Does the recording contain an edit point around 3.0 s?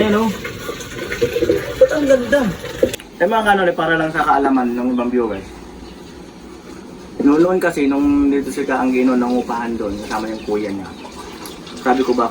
yes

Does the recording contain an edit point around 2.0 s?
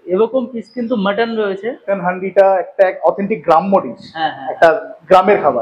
yes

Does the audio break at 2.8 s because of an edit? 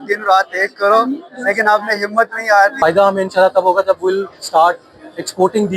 yes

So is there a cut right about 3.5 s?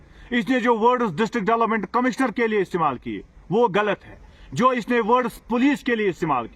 no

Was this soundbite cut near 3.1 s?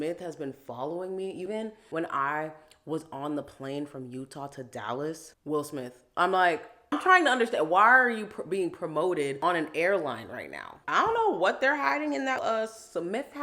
no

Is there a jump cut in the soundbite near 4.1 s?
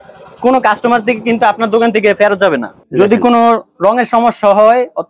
no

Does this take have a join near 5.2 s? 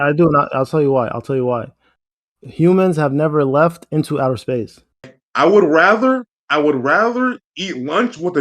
yes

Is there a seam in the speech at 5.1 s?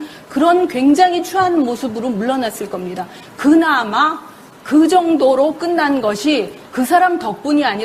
no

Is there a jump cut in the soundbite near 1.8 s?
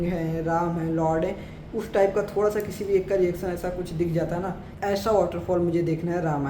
no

